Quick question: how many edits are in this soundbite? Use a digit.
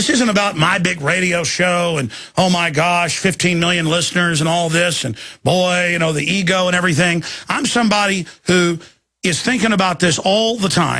0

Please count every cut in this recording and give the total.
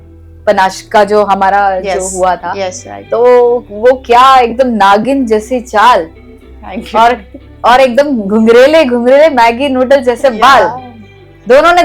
0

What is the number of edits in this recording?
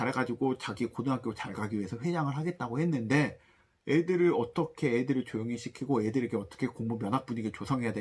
0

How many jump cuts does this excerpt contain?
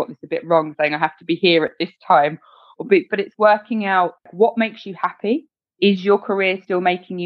1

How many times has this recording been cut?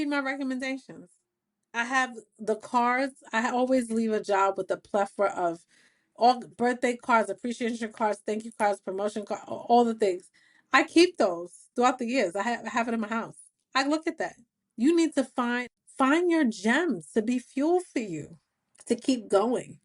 1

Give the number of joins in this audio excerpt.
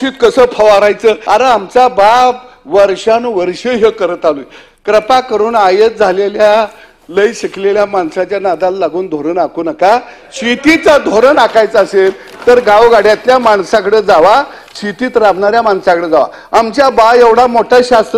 1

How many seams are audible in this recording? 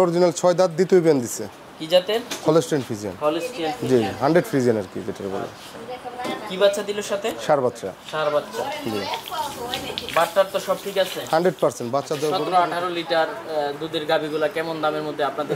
1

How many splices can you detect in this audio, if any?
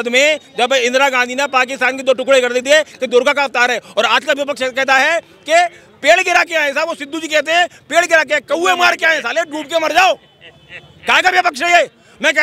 0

